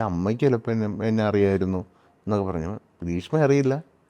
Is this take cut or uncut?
uncut